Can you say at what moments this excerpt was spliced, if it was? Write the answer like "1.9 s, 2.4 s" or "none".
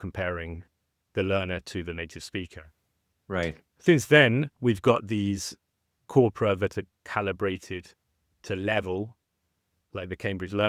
none